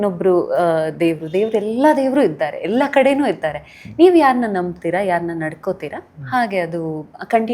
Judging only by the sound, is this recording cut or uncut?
uncut